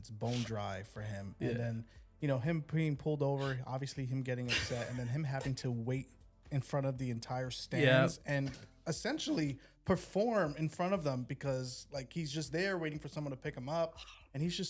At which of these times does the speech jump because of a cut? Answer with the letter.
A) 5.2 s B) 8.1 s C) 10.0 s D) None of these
D